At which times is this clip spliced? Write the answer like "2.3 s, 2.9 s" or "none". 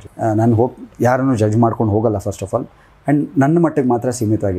none